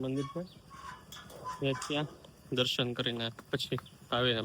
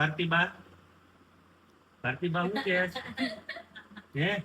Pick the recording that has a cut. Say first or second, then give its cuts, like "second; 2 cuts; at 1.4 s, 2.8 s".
first; 1 cut; at 3.4 s